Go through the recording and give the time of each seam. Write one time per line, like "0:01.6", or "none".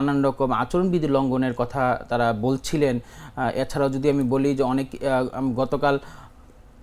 none